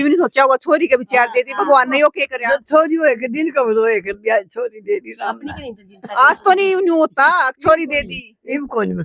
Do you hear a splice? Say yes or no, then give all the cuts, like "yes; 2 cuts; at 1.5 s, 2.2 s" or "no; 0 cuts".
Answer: no; 0 cuts